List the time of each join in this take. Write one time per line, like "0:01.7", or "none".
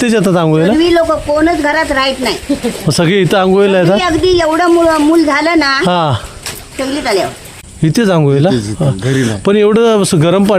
0:07.6